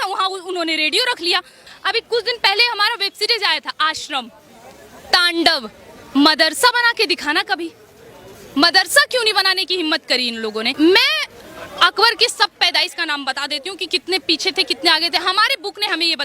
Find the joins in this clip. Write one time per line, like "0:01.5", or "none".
0:01.7
0:10.7